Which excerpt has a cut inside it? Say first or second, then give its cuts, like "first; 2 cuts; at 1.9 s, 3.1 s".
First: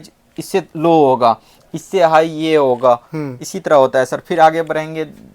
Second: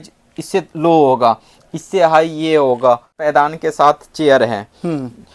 second; 1 cut; at 3.1 s